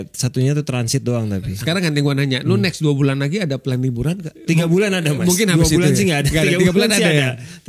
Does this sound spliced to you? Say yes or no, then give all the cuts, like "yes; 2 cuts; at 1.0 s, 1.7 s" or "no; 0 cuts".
yes; 2 cuts; at 1.6 s, 4.3 s